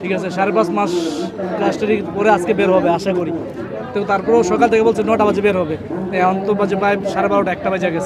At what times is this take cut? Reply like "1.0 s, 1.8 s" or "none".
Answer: none